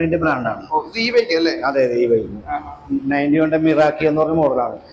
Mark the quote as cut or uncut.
uncut